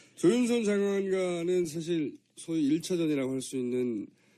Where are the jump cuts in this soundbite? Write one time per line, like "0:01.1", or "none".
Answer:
0:01.9